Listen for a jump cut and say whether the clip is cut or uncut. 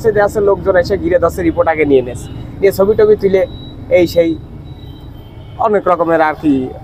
uncut